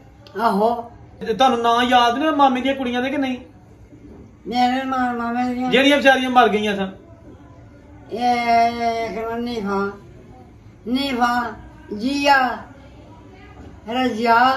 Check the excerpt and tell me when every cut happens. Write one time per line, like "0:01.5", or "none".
0:01.2